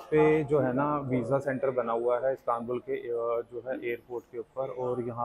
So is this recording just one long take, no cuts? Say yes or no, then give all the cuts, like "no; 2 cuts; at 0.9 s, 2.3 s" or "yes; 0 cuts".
yes; 0 cuts